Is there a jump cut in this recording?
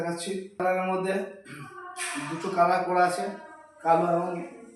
no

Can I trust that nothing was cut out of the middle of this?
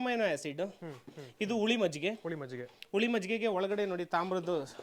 yes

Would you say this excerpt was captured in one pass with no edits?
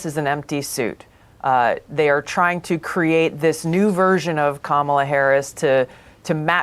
yes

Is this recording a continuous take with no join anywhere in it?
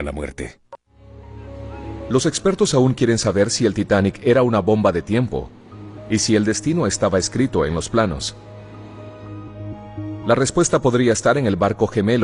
yes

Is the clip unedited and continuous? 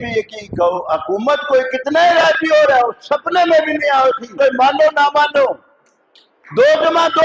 no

